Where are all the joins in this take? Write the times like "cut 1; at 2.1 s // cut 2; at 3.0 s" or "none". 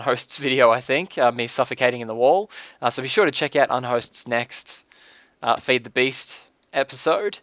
cut 1; at 1.5 s